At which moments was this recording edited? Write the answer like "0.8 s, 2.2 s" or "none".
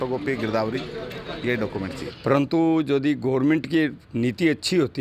2.1 s